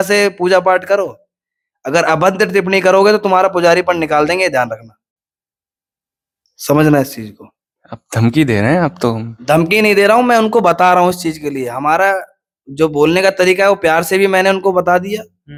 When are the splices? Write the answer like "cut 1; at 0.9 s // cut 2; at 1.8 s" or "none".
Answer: none